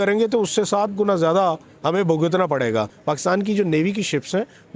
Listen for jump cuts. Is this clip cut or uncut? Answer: cut